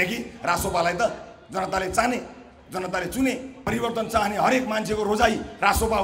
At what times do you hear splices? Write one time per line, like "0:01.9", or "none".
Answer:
0:03.5